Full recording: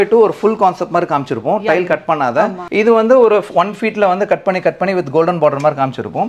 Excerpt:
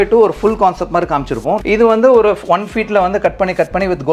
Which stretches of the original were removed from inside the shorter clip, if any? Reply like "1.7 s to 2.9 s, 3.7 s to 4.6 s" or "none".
1.6 s to 2.7 s